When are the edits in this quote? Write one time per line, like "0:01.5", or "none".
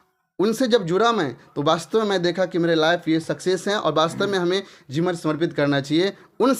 none